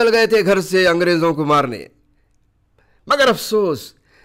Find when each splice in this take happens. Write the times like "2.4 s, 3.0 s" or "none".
none

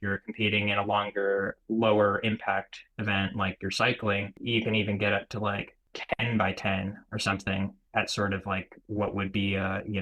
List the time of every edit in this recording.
1.6 s, 4.4 s, 5.9 s, 7.8 s

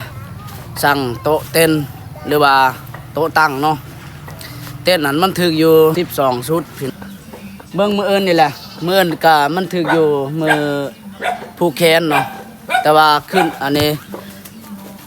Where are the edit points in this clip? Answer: 5.9 s, 6.9 s

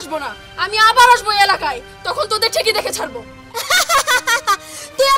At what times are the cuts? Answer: 3.6 s

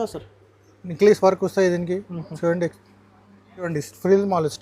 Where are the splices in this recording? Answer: 3.7 s

